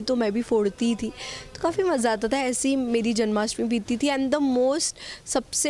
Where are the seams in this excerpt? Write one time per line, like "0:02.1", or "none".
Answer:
none